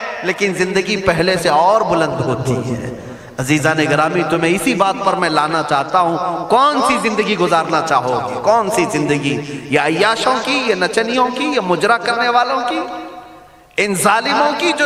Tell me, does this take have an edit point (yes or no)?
no